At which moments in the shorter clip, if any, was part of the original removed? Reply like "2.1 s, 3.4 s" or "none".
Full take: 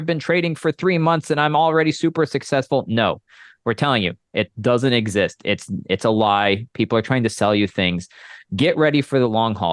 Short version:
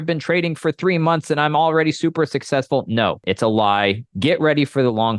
3.2 s, 4.0 s